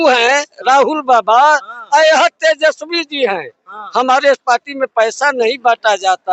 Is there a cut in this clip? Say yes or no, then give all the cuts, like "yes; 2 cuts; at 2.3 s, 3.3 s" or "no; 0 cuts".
no; 0 cuts